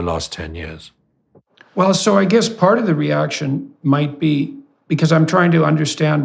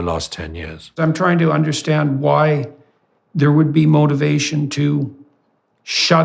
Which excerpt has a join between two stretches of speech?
second; 1 cut; at 1.0 s

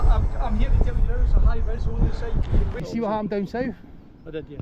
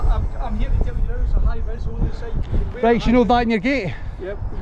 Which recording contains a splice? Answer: first; 1 cut; at 2.7 s

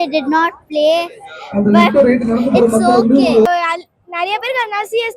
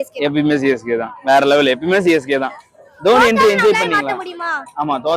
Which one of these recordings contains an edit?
first; 1 cut; at 3.5 s

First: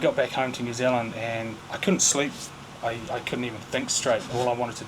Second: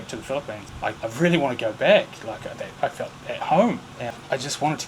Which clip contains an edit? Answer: second; 2 cuts; at 1.0 s, 3.9 s

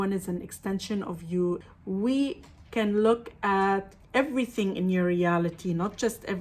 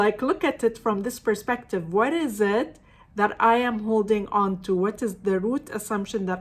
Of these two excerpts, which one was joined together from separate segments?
first; 1 cut; at 1.6 s

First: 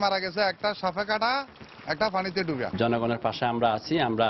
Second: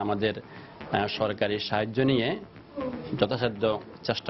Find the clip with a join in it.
first; 1 cut; at 2.7 s

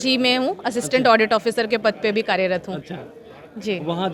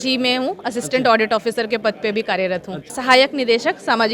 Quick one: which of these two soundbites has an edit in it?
second; 1 cut; at 3.0 s

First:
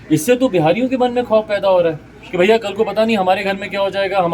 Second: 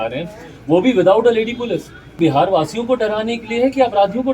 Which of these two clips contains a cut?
second; 1 cut; at 2.2 s

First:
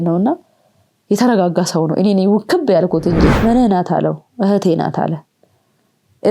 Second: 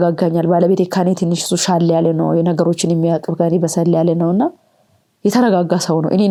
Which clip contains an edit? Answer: first; 1 cut; at 3.4 s

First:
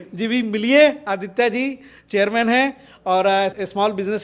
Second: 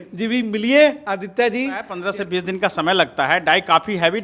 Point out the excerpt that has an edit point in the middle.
second; 1 cut; at 2.0 s

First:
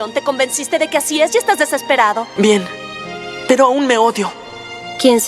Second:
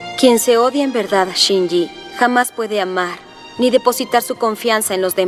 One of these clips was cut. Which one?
first; 1 cut; at 2.3 s

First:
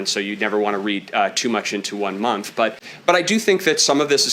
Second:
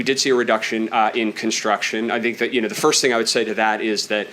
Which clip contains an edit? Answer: first; 1 cut; at 2.9 s

